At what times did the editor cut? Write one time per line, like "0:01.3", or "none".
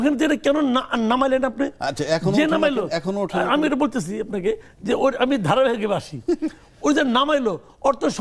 none